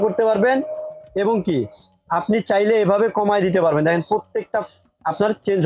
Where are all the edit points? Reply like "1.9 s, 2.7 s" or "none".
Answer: none